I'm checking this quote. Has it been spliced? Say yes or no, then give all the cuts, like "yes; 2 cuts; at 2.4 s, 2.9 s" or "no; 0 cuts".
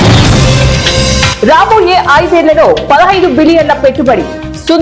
yes; 1 cut; at 1.3 s